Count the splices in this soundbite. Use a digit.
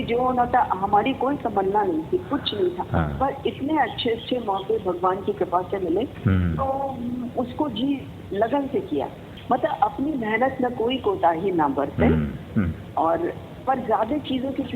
1